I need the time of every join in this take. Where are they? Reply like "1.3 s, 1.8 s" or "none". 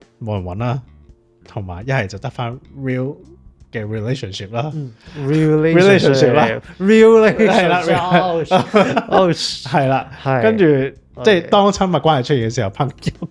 11.1 s